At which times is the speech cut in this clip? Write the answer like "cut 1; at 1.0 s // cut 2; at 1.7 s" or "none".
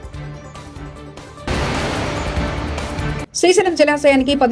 cut 1; at 1.5 s // cut 2; at 3.2 s